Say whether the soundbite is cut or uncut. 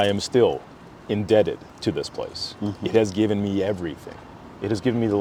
uncut